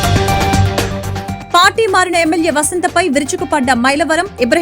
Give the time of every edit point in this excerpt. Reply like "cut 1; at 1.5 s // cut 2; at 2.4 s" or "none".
cut 1; at 1.0 s